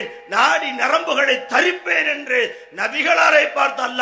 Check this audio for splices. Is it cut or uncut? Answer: uncut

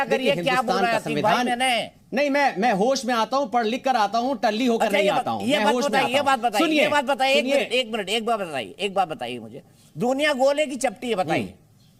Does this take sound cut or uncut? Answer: uncut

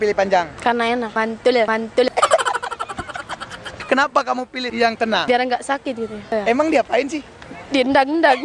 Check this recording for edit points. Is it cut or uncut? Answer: cut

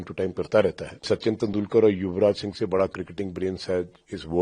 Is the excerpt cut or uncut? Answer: cut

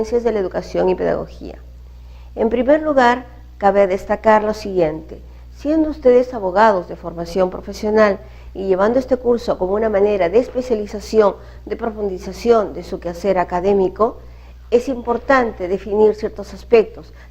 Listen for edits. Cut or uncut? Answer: cut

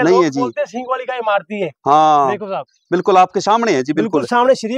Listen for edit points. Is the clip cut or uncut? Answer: uncut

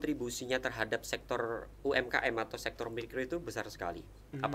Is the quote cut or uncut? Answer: uncut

